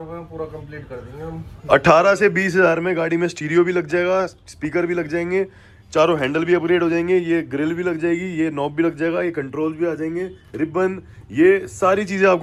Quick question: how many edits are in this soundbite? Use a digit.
0